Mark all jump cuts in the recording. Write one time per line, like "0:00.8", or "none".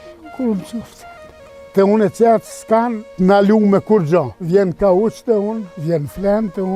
0:01.6
0:03.0
0:04.4
0:05.7